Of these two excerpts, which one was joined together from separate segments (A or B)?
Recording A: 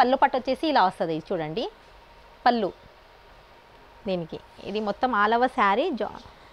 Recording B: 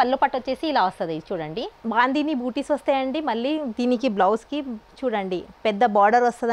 B